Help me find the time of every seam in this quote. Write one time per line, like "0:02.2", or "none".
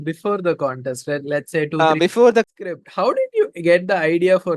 0:02.6